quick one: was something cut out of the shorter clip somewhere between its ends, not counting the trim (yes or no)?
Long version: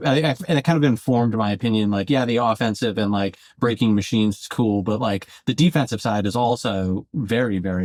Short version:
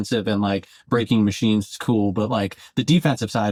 no